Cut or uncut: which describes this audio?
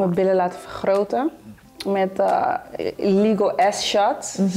uncut